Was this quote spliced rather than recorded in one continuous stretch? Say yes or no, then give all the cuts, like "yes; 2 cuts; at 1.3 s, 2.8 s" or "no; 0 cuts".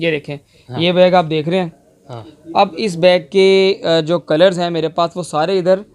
no; 0 cuts